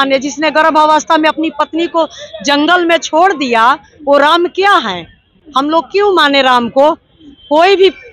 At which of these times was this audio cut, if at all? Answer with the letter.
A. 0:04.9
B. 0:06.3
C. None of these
C